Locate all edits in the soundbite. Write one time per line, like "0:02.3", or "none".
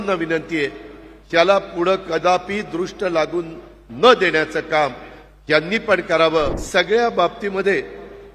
0:06.6